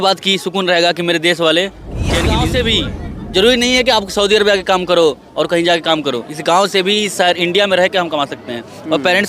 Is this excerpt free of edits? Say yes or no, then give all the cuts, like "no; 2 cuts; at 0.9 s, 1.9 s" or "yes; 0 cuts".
no; 1 cut; at 2.3 s